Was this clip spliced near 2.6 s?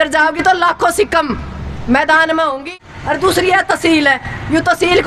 yes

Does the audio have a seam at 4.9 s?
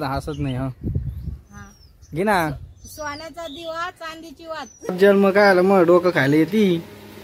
yes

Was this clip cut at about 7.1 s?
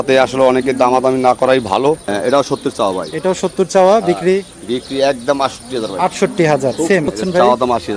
yes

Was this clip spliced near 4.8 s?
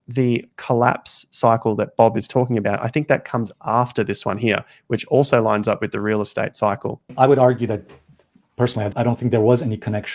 no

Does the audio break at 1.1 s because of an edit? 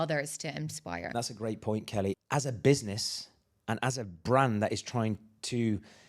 yes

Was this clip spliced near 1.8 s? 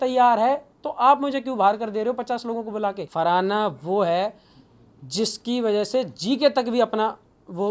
no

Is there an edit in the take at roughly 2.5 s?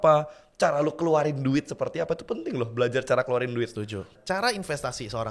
no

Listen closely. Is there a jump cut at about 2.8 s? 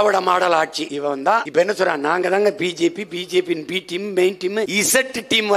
no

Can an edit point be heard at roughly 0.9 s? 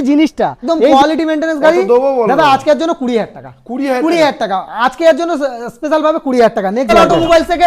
yes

